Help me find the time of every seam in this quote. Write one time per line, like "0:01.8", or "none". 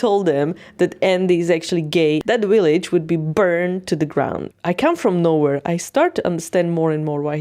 0:02.2
0:04.5